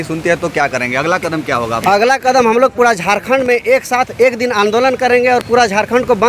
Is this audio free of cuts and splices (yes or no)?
yes